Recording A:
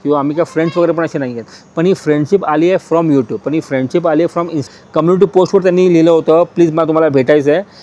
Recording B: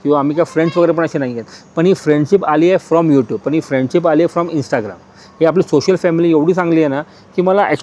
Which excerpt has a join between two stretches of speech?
A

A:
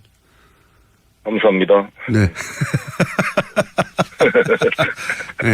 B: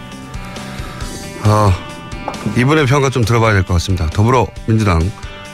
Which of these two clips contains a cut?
A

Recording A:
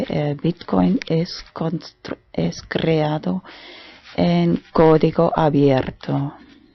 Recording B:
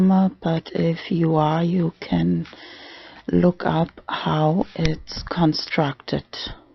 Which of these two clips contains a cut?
B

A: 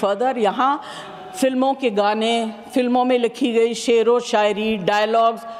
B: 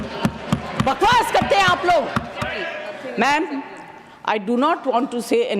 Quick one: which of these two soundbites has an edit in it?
B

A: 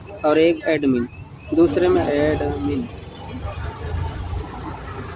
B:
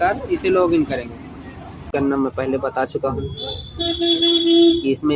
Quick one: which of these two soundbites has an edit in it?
B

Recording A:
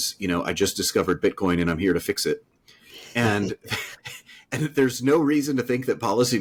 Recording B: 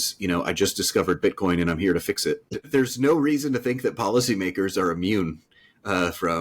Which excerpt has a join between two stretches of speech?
B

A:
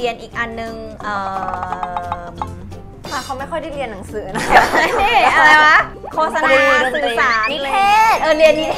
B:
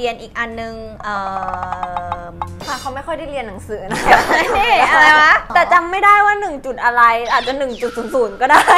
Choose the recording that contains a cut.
B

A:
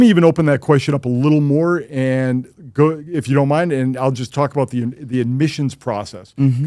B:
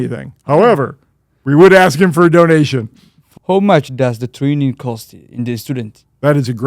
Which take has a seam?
B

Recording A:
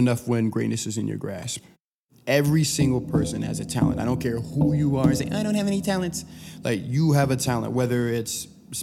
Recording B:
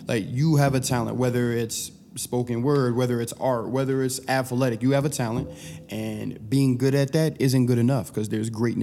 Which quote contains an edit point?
A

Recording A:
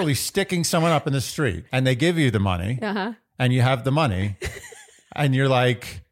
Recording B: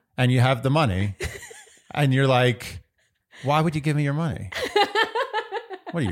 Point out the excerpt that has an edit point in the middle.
A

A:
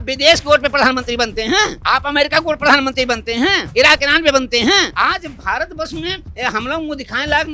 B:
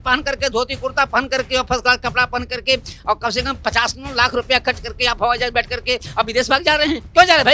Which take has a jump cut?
A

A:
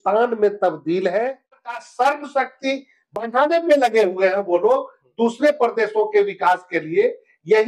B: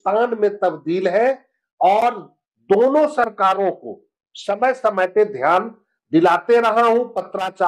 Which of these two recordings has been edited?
A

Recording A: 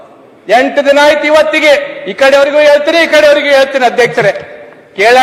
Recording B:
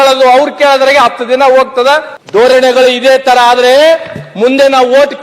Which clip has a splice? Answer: B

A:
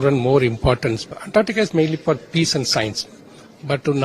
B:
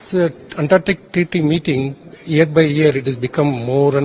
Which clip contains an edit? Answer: A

